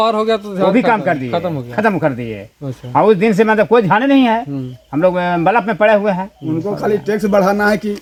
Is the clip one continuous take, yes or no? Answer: yes